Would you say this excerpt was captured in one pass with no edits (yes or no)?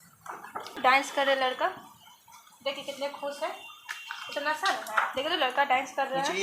no